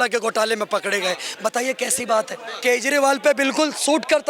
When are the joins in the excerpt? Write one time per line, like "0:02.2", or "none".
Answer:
0:02.4

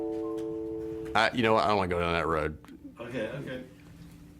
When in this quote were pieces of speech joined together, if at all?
0:01.0

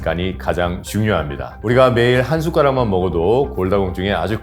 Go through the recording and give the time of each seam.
0:01.5

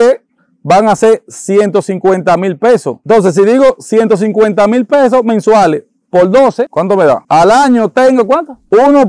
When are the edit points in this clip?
0:02.9

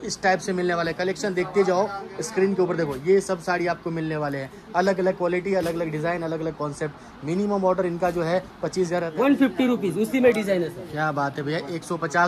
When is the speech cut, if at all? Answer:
0:09.1

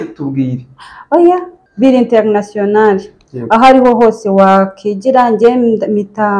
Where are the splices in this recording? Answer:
0:01.2

